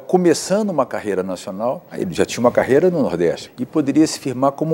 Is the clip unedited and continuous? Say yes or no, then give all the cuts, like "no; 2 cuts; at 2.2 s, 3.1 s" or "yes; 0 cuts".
no; 2 cuts; at 2.0 s, 3.5 s